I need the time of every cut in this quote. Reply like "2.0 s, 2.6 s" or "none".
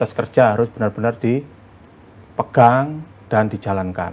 none